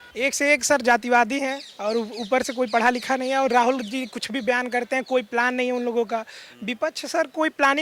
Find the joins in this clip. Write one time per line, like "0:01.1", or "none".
none